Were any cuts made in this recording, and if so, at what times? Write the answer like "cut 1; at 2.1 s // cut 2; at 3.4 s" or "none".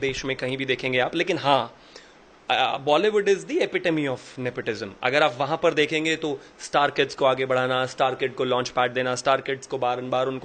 none

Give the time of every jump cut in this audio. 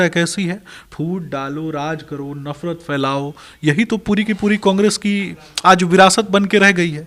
none

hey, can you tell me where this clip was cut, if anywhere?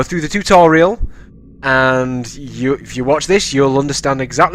none

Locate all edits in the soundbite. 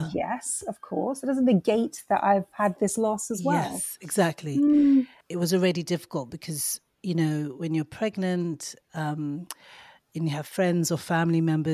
cut 1; at 5.2 s

